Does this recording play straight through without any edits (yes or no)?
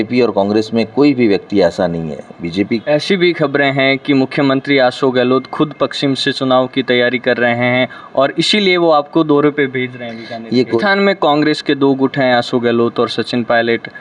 no